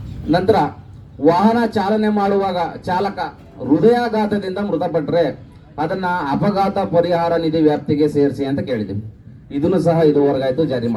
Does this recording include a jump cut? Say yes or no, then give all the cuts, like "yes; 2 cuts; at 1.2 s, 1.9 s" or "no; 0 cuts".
no; 0 cuts